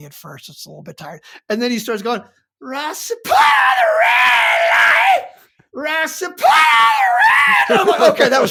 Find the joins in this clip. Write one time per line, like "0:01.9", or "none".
none